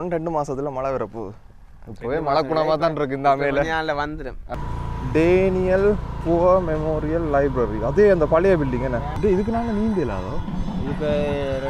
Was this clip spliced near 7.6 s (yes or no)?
no